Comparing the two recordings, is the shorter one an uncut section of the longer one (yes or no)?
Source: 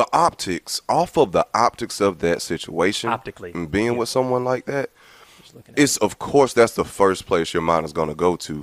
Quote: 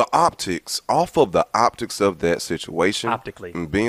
yes